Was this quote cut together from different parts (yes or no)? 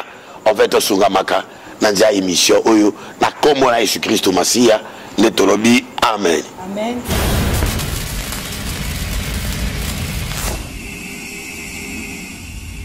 yes